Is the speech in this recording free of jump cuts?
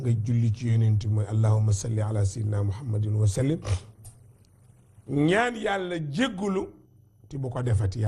no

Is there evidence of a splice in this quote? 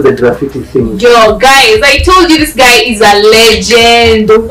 no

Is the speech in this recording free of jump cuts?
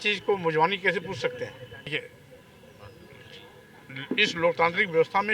no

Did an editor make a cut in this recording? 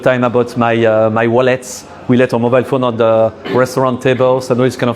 no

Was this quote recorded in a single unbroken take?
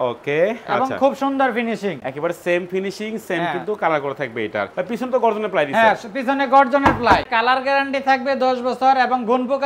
no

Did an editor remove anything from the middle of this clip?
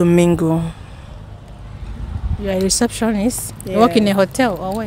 no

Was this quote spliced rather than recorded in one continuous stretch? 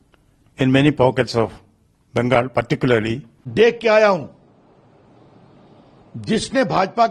yes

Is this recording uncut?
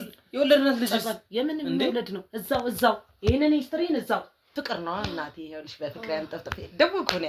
no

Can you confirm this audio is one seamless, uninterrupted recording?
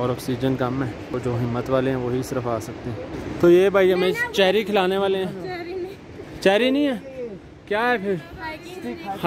no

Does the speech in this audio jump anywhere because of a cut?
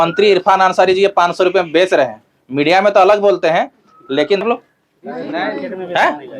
yes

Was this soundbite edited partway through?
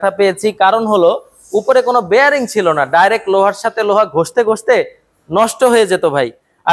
no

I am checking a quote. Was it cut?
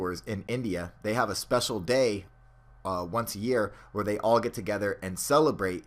yes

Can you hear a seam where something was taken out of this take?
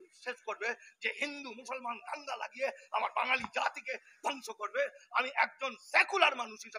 no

